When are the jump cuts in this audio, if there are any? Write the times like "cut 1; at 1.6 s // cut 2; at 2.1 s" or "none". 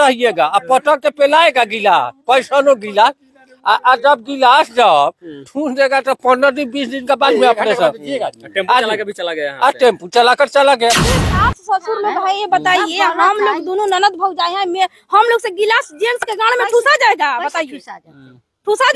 cut 1; at 11.1 s